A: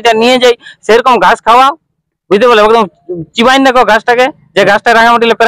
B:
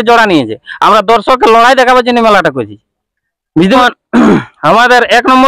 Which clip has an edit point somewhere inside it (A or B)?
B